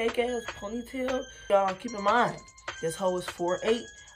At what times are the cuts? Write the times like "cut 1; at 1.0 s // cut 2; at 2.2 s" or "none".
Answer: cut 1; at 1.3 s